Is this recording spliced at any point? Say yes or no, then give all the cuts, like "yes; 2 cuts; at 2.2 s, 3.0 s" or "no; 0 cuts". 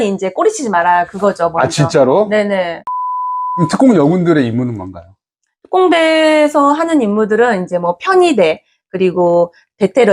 yes; 1 cut; at 3.1 s